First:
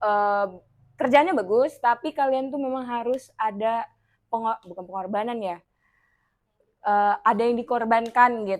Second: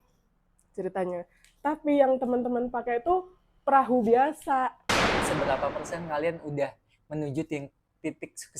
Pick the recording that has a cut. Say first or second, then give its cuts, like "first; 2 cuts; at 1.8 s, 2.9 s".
second; 1 cut; at 5.3 s